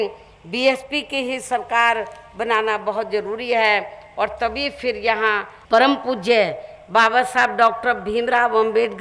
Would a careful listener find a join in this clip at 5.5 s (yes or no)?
yes